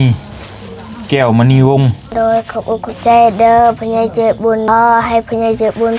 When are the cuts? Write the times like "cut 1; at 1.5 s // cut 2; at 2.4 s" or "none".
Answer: cut 1; at 2.0 s // cut 2; at 4.6 s